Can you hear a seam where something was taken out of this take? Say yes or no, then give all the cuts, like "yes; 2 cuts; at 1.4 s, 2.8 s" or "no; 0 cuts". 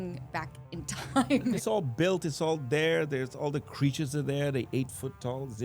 yes; 1 cut; at 1.6 s